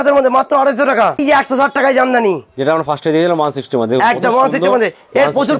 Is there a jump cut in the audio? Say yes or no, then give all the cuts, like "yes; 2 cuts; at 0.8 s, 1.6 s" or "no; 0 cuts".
yes; 1 cut; at 1.2 s